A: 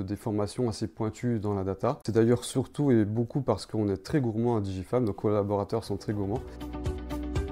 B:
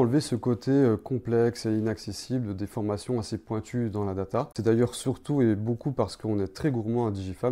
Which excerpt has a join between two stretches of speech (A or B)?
A